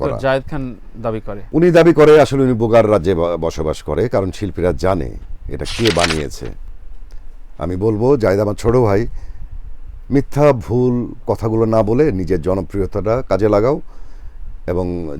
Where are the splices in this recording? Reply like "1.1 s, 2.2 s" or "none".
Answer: 1.4 s

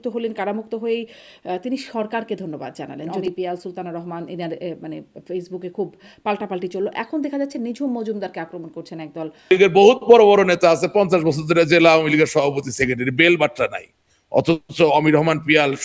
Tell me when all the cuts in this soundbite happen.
3.2 s, 9.5 s

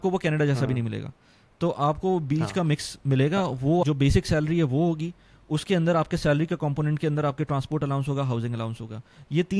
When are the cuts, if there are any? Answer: 3.8 s

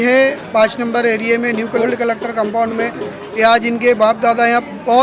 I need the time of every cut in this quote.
1.8 s

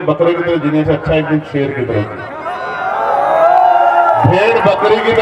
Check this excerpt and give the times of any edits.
none

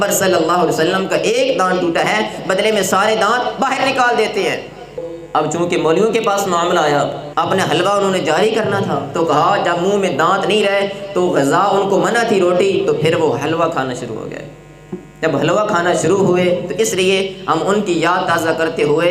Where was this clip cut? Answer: 5.1 s, 7.2 s

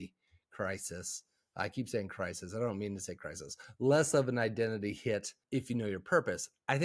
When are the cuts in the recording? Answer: 5.3 s

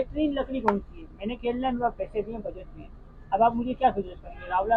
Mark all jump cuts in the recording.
none

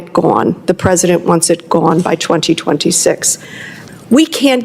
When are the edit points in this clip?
3.8 s

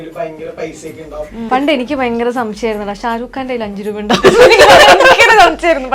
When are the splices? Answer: 1.4 s

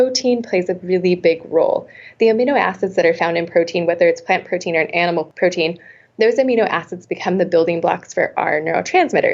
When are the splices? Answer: 5.3 s

